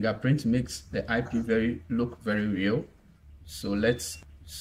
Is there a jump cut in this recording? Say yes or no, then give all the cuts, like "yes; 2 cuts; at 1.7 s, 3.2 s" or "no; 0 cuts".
no; 0 cuts